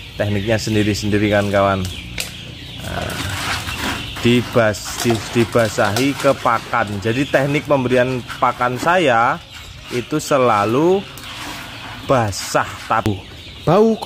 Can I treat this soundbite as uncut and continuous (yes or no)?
no